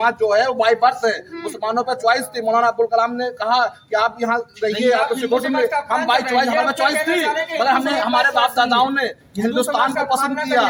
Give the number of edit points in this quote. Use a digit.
0